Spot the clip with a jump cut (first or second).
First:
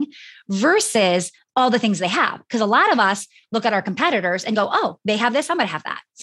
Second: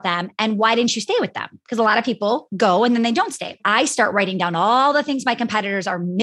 second